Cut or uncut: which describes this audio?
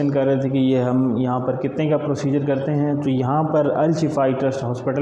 uncut